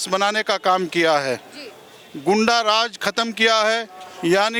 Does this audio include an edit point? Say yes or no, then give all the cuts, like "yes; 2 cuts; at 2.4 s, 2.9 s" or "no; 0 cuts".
no; 0 cuts